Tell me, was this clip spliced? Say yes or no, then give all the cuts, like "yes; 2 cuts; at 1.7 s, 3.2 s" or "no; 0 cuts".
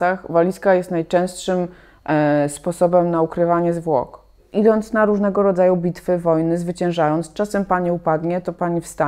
yes; 1 cut; at 4.4 s